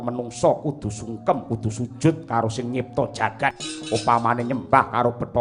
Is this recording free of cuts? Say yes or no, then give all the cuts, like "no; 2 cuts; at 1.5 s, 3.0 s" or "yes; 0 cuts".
no; 1 cut; at 3.7 s